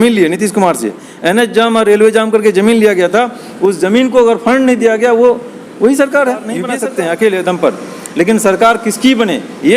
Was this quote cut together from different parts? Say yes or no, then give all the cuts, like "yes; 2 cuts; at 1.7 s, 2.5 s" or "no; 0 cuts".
yes; 1 cut; at 6.7 s